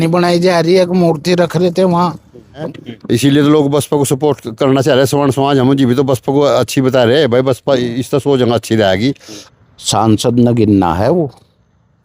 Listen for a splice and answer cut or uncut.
cut